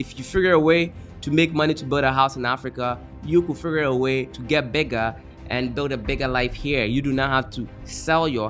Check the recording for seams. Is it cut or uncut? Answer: cut